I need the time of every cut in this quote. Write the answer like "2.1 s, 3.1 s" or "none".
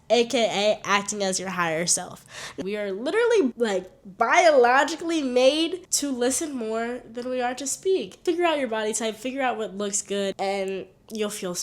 2.6 s, 8.2 s